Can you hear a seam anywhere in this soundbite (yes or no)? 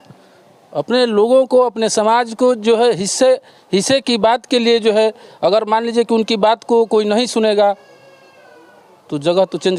no